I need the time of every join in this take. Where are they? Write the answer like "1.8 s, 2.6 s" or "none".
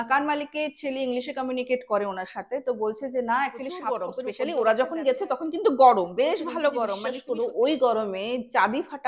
4.2 s, 7.1 s